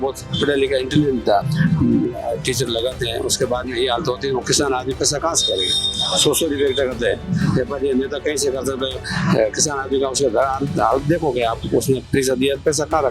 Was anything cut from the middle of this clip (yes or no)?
yes